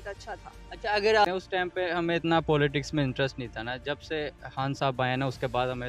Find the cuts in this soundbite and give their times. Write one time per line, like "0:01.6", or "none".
0:01.2